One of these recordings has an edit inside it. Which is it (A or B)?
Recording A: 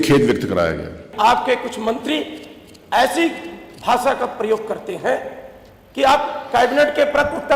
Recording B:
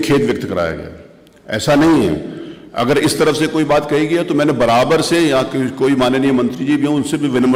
A